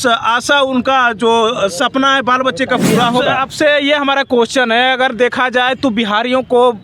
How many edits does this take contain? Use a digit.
1